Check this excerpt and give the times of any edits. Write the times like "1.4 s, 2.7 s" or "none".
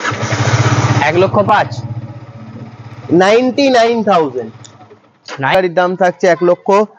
5.5 s

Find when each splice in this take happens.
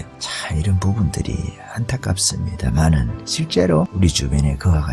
3.9 s

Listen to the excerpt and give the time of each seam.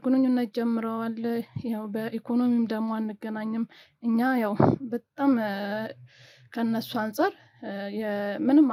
none

